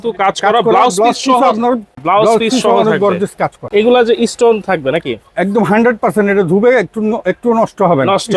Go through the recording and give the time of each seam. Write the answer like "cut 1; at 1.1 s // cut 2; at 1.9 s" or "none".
cut 1; at 1.9 s // cut 2; at 3.6 s